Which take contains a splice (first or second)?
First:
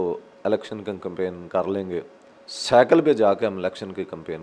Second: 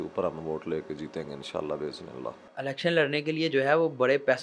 second